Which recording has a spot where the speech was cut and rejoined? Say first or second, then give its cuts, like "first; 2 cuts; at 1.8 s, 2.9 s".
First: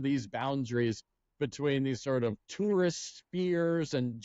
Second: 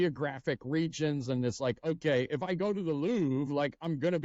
first; 1 cut; at 2.4 s